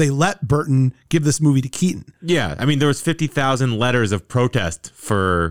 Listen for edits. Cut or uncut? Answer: cut